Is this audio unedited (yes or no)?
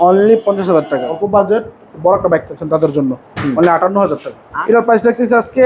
no